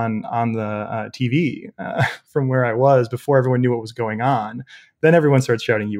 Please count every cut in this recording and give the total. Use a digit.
0